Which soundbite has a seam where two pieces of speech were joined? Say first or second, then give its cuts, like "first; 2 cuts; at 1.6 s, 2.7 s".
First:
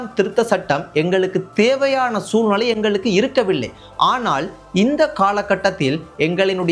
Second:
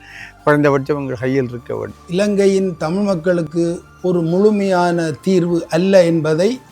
second; 1 cut; at 1.9 s